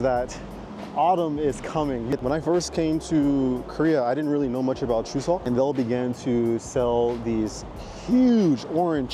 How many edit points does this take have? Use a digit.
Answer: 2